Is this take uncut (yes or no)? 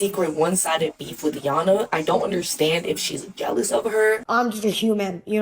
no